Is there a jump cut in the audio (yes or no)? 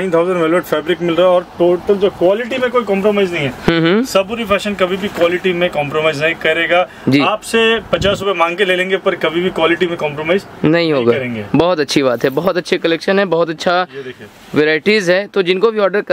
no